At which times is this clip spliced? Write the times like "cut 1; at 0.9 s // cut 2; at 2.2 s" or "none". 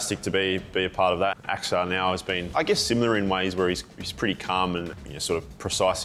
cut 1; at 1.4 s // cut 2; at 2.5 s // cut 3; at 5.0 s